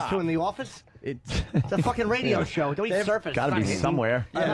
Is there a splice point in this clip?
no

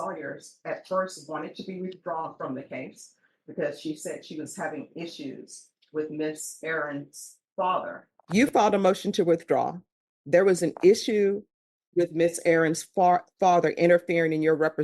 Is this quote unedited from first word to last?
no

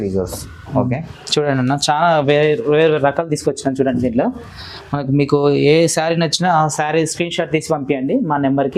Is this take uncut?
yes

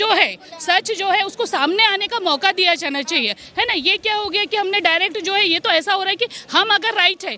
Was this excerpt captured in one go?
yes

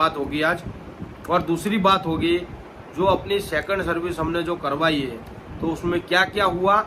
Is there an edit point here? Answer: no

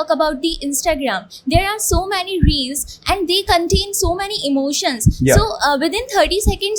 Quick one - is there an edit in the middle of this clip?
no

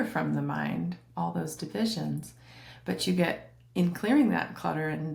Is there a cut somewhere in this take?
no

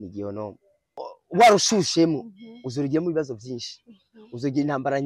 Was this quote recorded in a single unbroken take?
no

